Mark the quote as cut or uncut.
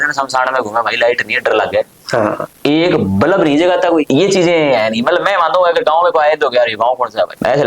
uncut